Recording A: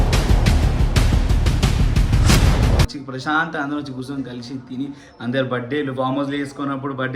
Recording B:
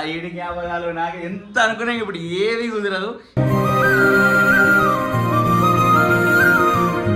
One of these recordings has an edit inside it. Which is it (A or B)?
A